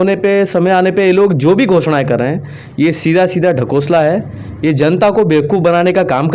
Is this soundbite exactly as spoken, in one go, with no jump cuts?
yes; 0 cuts

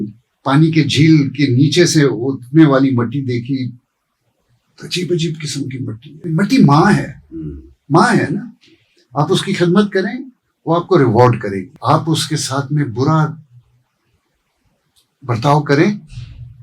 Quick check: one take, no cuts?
no; 2 cuts; at 6.1 s, 11.7 s

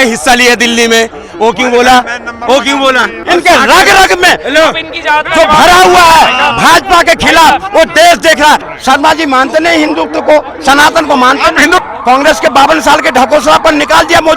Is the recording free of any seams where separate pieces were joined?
no; 3 cuts; at 3.2 s, 8.7 s, 11.8 s

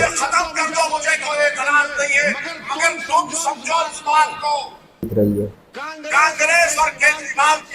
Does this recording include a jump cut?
yes; 1 cut; at 5.1 s

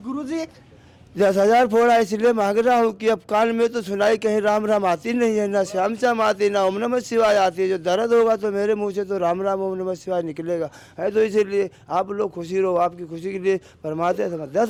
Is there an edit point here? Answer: no; 0 cuts

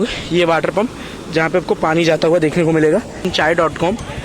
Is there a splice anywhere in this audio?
yes; 1 cut; at 3.3 s

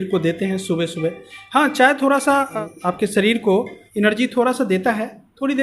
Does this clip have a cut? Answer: yes; 2 cuts; at 2.5 s, 3.8 s

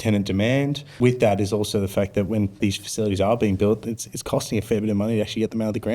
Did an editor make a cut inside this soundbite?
yes; 2 cuts; at 0.9 s, 2.6 s

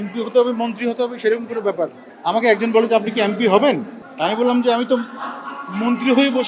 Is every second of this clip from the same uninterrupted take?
yes; 0 cuts

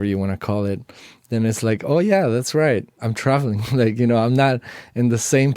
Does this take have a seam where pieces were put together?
yes; 1 cut; at 3.0 s

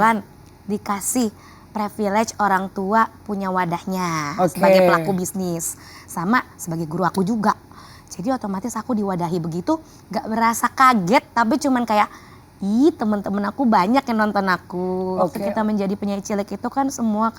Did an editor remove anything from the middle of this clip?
yes; 1 cut; at 15.4 s

